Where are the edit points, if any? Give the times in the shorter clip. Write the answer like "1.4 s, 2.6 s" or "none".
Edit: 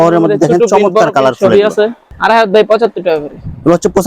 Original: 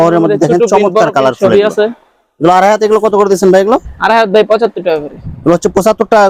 2.1 s